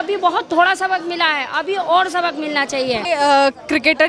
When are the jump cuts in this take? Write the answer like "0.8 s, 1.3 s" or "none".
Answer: 3.0 s